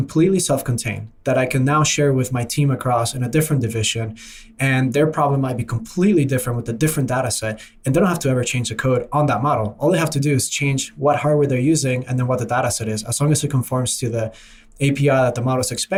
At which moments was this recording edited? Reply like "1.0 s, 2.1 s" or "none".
none